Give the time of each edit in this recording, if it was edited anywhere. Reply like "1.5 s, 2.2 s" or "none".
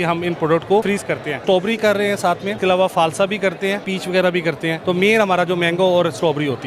1.3 s, 2.5 s, 3.9 s, 4.8 s